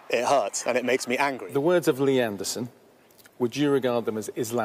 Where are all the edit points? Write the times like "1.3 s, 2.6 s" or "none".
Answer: 1.4 s